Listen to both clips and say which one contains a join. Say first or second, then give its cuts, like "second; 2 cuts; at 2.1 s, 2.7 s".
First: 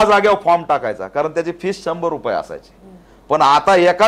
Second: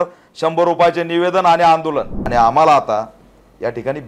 second; 1 cut; at 2.2 s